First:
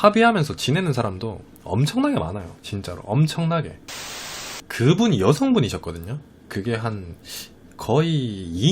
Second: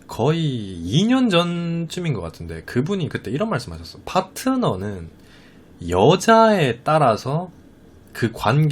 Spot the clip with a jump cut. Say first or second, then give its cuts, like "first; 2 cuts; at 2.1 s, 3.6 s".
first; 1 cut; at 4.0 s